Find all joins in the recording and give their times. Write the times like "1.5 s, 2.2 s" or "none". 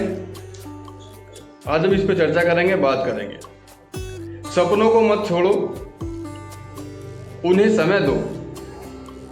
5.9 s, 7.1 s